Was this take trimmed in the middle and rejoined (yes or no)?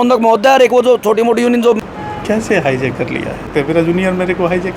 yes